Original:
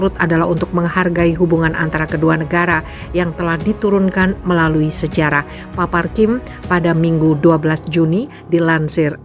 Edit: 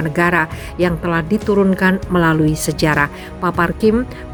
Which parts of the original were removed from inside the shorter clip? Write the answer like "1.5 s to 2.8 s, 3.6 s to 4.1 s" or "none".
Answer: none

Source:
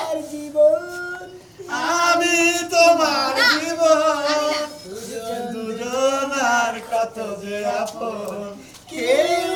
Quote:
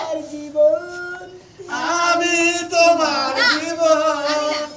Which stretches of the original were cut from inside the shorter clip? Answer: none

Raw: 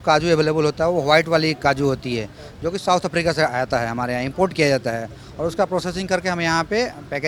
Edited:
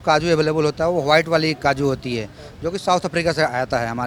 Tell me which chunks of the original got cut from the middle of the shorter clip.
none

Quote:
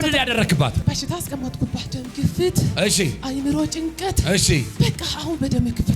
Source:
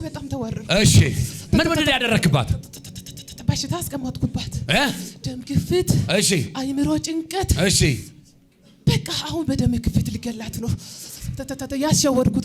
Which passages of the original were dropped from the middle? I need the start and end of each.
2.5 s to 3.4 s, 4.5 s to 5.2 s, 8.0 s to 8.8 s

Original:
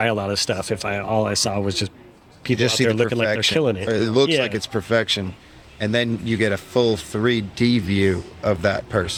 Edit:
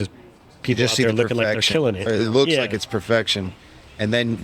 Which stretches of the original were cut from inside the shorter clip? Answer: none

